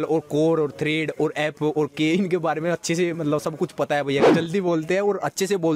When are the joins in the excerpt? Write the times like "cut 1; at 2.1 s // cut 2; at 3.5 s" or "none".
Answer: cut 1; at 4.3 s